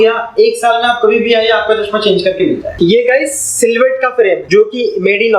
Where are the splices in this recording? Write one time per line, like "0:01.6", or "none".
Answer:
0:02.7
0:04.4